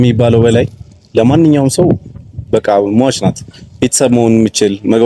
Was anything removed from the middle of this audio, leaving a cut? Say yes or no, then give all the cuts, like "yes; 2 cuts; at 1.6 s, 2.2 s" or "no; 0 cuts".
no; 0 cuts